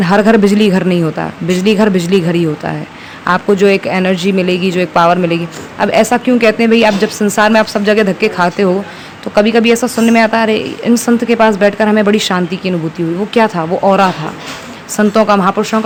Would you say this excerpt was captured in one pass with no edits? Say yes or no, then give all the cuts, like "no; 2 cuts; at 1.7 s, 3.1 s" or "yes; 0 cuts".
yes; 0 cuts